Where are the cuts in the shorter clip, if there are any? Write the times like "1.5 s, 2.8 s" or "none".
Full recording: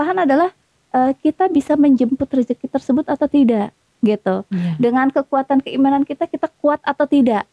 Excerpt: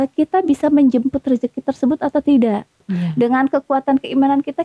2.8 s